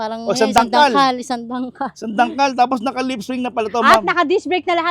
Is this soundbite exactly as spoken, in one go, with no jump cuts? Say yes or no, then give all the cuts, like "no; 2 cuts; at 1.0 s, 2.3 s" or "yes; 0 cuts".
yes; 0 cuts